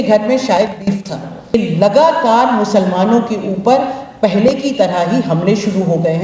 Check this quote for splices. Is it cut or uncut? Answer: cut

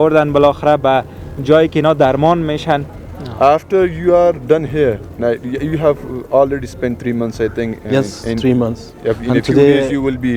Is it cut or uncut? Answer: cut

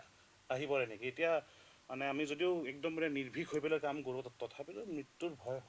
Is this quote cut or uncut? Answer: uncut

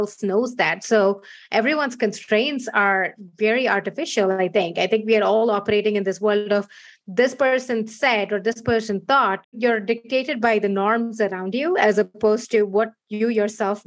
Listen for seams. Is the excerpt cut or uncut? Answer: cut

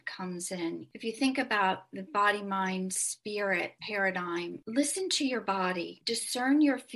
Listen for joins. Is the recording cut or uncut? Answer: cut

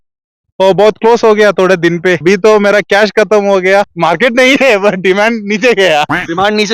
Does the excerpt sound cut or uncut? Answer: cut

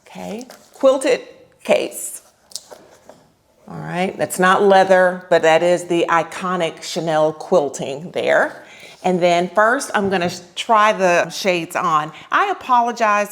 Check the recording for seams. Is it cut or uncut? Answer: uncut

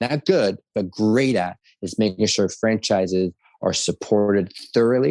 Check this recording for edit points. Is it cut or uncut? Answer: uncut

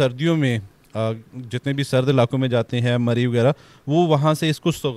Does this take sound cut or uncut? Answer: uncut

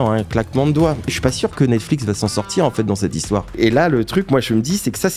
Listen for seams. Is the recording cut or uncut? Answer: cut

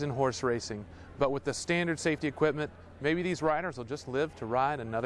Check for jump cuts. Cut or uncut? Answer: uncut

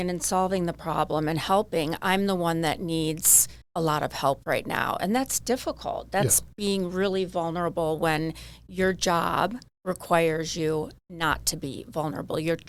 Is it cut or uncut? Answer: uncut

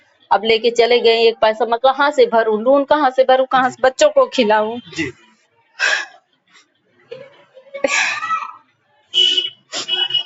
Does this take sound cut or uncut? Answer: uncut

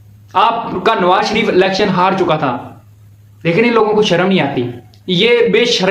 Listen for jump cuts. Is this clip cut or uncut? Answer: uncut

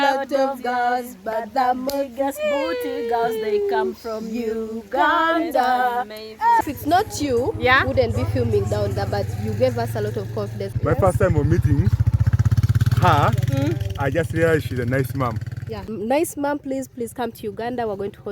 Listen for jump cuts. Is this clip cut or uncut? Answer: cut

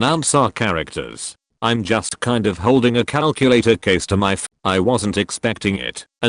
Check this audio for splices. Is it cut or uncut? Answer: cut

